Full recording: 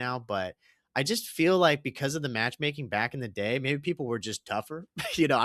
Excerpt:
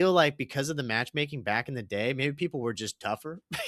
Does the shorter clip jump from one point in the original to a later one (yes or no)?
no